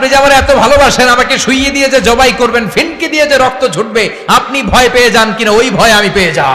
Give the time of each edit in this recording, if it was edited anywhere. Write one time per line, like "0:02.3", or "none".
none